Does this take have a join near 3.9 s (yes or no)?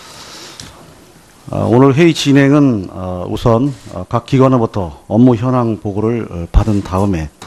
no